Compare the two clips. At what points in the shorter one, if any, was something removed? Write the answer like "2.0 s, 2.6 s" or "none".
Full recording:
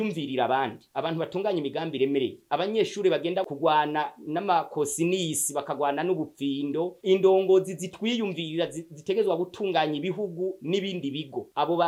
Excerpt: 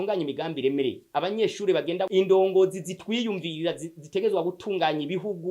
2.1 s